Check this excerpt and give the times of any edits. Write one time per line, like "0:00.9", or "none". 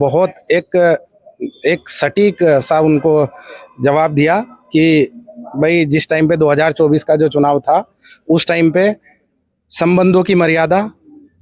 none